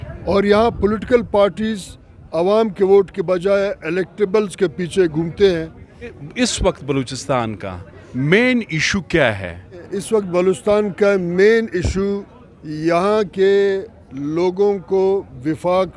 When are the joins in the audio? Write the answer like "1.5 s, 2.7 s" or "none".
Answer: 6.2 s, 9.9 s